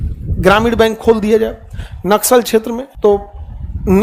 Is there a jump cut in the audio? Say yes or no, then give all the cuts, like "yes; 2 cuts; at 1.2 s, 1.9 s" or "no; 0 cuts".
no; 0 cuts